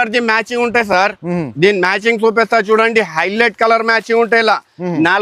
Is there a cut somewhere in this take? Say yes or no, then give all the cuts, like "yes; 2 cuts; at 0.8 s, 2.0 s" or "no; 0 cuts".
no; 0 cuts